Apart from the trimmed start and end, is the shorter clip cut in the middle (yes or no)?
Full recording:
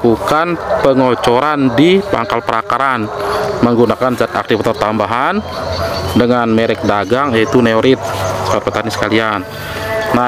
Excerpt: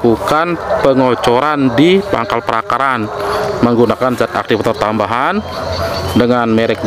no